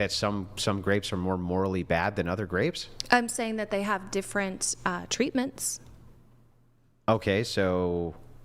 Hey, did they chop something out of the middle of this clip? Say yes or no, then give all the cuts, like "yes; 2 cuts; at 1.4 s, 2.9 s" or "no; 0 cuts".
no; 0 cuts